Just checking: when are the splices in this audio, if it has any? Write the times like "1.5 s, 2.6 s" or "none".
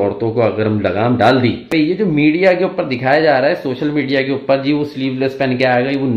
1.7 s